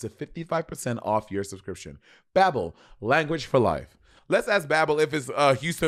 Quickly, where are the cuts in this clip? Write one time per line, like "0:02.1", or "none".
none